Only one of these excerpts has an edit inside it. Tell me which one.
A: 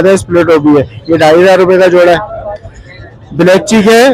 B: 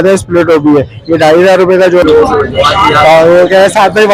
B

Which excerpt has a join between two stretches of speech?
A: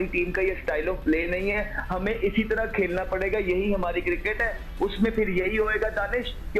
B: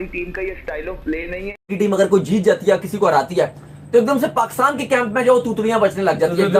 B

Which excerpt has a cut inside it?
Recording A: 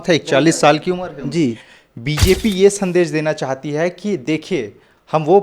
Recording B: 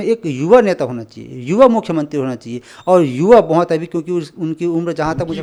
A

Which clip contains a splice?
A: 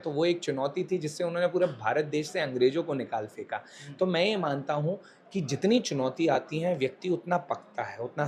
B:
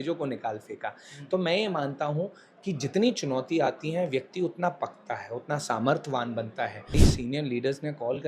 B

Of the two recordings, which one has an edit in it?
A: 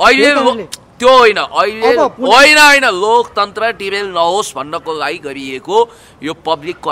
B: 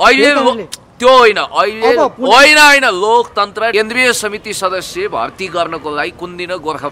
B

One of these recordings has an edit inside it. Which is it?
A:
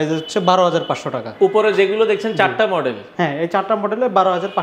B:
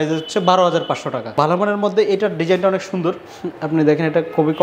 B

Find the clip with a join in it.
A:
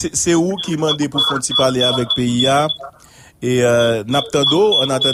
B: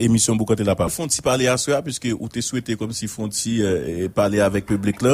B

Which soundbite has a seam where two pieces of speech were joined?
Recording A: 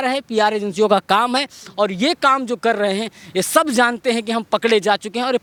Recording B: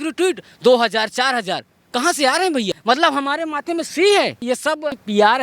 B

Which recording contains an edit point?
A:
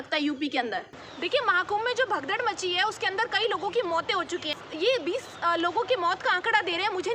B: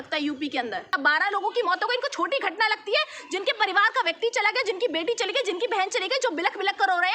B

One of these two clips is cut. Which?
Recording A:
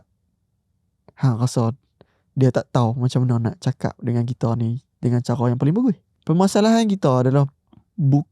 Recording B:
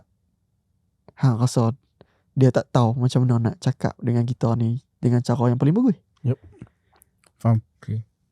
A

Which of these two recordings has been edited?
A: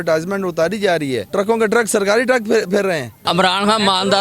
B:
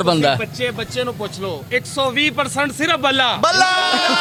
A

